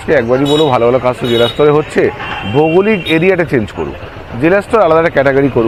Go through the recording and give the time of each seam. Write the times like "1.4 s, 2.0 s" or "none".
none